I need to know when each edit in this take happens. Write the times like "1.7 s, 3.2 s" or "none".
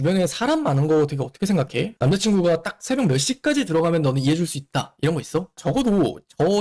1.9 s, 5.5 s